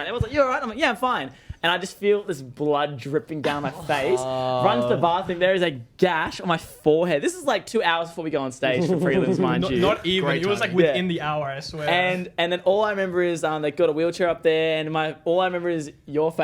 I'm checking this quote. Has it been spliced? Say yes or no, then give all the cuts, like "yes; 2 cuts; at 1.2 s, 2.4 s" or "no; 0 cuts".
no; 0 cuts